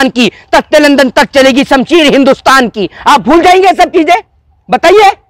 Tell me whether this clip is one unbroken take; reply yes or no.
yes